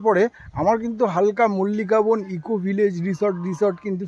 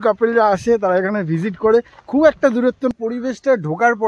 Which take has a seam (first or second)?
second